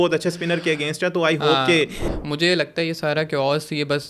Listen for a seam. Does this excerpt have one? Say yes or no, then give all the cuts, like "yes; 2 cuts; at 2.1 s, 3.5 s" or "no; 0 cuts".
yes; 1 cut; at 2.1 s